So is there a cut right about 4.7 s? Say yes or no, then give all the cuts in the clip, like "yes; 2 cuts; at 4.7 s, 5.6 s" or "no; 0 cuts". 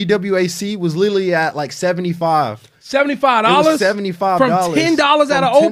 no; 0 cuts